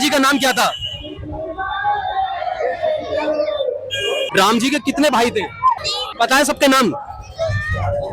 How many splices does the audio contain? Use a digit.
2